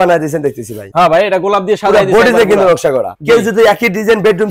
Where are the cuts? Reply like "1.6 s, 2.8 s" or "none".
none